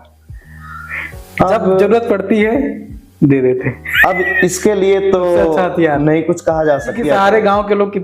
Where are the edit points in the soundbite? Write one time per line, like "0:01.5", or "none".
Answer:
0:06.9